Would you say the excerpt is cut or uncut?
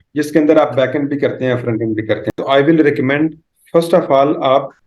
cut